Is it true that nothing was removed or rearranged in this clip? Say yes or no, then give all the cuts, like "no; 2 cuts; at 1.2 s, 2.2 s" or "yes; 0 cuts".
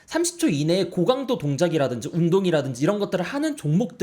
no; 1 cut; at 0.9 s